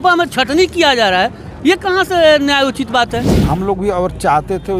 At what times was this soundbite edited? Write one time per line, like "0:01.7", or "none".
0:03.5